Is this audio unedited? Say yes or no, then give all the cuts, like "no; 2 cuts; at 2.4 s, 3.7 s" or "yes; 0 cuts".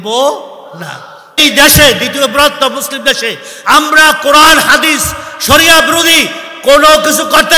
no; 1 cut; at 1.4 s